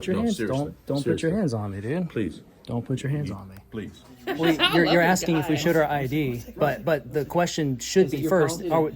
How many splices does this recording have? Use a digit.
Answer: 1